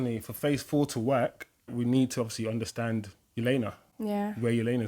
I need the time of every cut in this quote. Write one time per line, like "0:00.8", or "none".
0:01.7